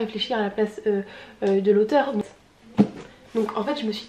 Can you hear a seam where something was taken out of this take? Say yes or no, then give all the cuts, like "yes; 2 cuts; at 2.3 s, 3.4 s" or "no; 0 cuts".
yes; 1 cut; at 2.3 s